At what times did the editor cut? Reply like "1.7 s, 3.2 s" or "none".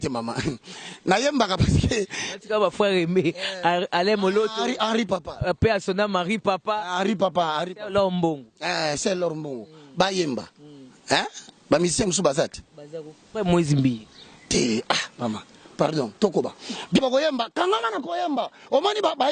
17.0 s